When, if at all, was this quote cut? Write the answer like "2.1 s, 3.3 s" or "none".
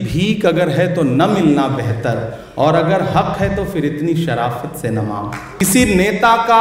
5.6 s